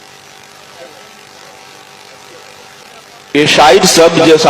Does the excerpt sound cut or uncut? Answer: cut